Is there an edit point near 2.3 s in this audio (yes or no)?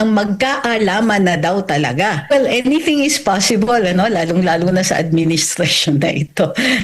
yes